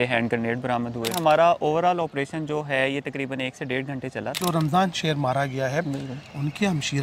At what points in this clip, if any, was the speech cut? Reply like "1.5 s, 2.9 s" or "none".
1.1 s, 4.4 s